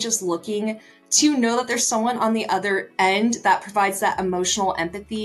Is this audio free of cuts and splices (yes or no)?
yes